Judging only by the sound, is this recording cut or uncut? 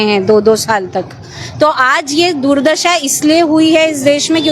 uncut